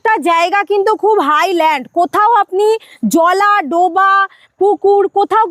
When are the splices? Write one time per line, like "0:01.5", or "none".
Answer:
none